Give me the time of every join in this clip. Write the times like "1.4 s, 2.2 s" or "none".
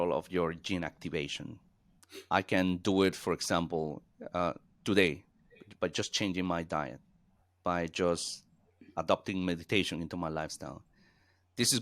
none

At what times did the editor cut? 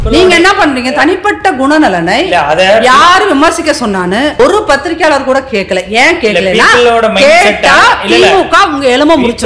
4.4 s

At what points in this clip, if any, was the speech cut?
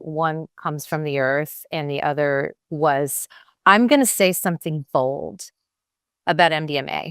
2.6 s, 3.2 s

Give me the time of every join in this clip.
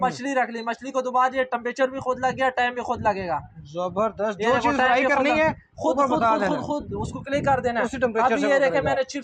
none

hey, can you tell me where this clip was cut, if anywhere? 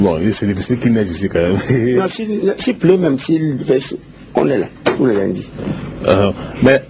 none

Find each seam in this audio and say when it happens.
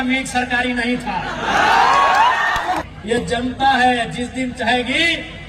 2.8 s

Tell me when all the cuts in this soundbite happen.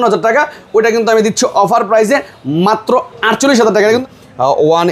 4.0 s

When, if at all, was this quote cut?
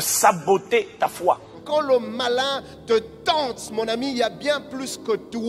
1.5 s

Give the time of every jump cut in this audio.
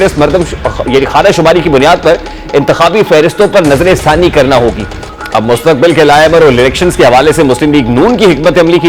5.1 s

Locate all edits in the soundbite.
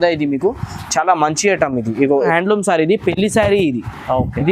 2.3 s

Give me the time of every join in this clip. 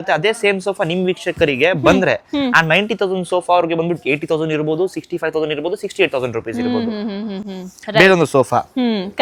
none

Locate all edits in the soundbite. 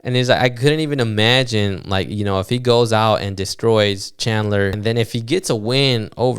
4.8 s

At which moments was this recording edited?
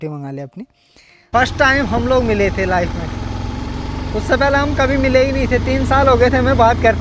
1.3 s

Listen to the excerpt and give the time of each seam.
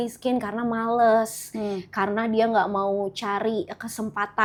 none

